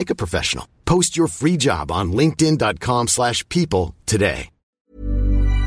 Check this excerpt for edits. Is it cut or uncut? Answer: cut